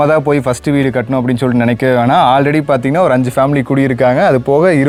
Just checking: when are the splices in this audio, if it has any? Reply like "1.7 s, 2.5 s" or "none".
none